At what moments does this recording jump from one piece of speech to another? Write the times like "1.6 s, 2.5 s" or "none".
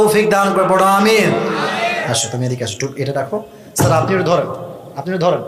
2.0 s